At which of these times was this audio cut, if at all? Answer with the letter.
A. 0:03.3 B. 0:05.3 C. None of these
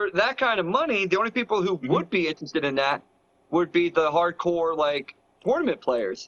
C